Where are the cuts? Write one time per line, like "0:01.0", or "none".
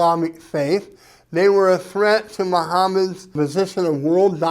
0:03.2

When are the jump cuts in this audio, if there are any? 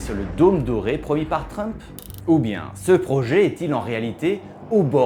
none

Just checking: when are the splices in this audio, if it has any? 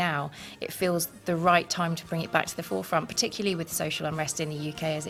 none

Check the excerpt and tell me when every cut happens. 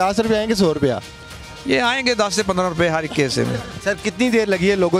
0:03.7

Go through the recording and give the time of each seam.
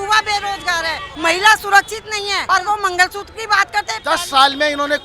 0:01.1
0:02.4
0:04.0

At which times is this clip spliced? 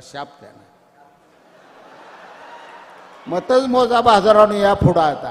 none

